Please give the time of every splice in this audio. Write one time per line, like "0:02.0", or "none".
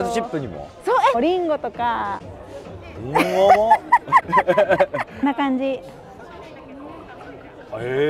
0:01.2
0:05.1